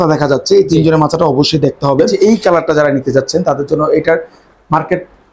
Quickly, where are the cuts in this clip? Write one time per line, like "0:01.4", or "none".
0:02.1